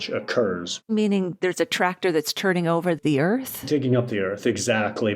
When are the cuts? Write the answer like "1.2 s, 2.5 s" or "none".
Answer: 0.9 s